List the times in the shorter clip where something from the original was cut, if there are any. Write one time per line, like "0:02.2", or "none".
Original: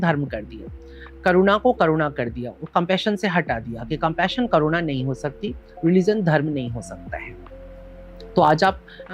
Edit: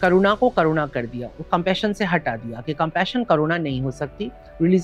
none